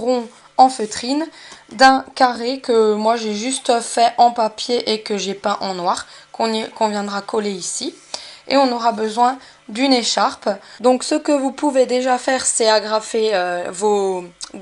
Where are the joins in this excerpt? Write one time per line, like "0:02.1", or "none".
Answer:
none